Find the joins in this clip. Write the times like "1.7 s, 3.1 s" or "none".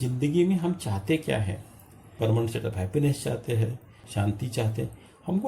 2.2 s, 4.0 s